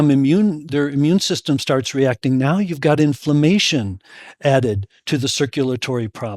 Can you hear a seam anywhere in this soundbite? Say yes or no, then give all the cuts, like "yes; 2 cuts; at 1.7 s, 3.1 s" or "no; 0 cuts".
no; 0 cuts